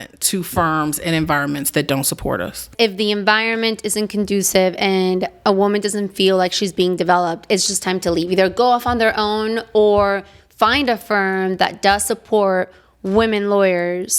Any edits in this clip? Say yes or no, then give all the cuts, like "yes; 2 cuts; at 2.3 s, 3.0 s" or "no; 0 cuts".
yes; 1 cut; at 2.7 s